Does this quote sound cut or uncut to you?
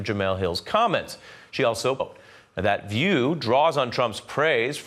uncut